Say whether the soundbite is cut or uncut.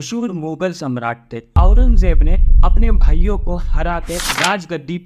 cut